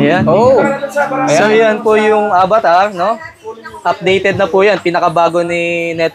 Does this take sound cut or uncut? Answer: uncut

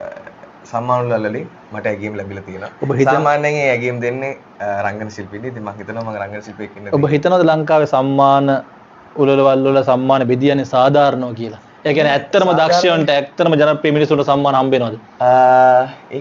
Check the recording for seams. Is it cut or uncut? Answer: uncut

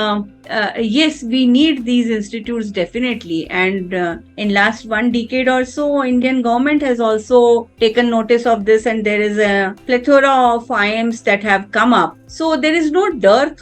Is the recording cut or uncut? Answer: uncut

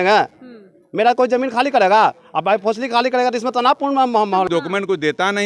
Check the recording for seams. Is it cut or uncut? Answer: cut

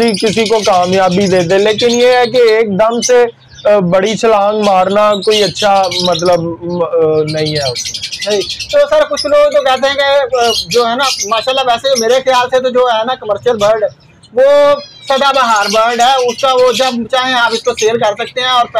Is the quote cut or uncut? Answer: uncut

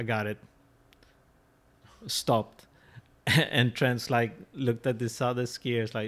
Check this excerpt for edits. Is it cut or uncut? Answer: uncut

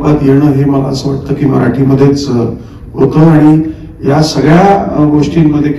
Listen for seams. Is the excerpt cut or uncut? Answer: uncut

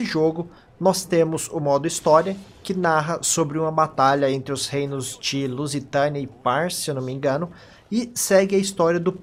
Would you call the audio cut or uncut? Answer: uncut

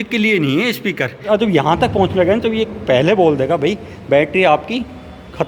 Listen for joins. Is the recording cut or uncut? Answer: cut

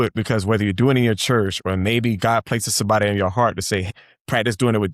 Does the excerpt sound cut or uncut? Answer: cut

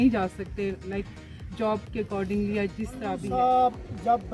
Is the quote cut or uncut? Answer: cut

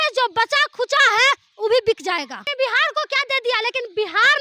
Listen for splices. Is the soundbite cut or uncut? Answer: cut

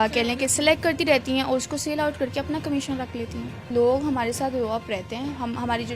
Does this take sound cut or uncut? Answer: cut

